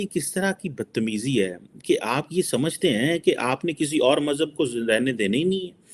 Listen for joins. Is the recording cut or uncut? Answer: uncut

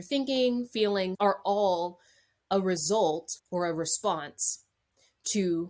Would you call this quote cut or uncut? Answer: cut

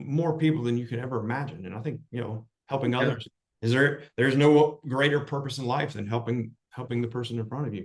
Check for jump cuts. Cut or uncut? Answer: uncut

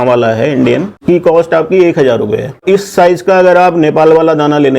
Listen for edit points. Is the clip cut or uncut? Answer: cut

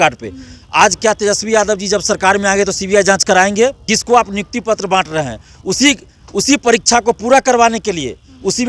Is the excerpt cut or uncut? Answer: cut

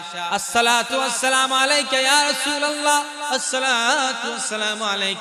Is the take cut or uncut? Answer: uncut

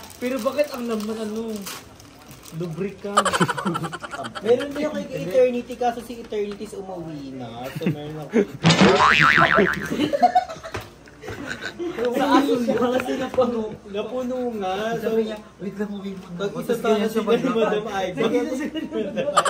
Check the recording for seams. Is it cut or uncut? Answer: cut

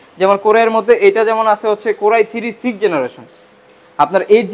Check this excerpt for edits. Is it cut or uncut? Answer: uncut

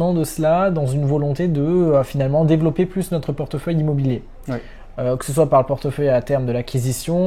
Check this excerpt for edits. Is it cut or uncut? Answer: uncut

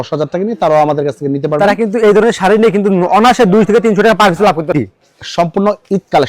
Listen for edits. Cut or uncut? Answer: cut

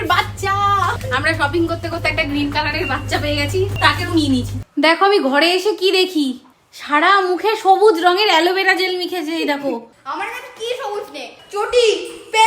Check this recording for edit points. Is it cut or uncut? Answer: cut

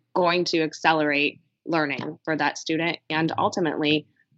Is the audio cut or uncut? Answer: uncut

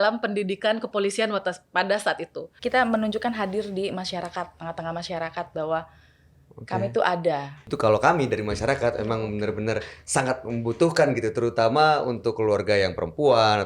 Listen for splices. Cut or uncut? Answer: cut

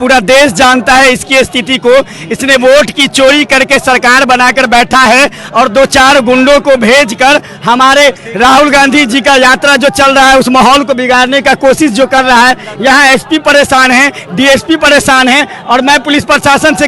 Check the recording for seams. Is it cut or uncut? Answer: uncut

